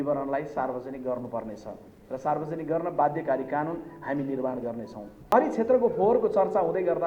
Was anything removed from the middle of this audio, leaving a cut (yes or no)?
yes